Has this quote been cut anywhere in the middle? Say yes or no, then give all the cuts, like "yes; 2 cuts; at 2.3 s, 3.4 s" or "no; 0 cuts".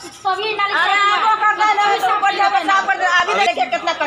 no; 0 cuts